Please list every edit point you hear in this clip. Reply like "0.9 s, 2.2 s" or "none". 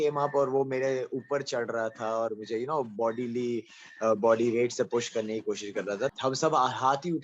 6.1 s